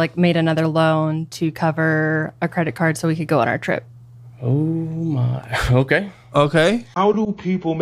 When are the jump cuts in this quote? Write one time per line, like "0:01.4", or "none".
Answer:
0:06.9